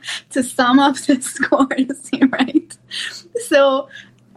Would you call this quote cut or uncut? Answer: uncut